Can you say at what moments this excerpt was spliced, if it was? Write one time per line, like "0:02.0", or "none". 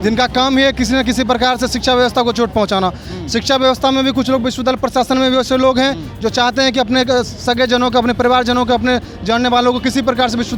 none